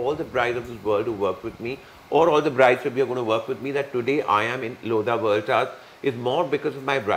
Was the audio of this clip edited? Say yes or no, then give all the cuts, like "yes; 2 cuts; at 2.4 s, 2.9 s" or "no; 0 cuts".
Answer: no; 0 cuts